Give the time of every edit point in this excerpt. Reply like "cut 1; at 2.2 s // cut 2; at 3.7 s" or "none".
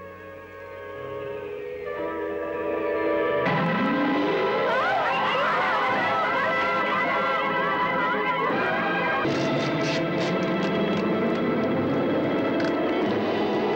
cut 1; at 9.2 s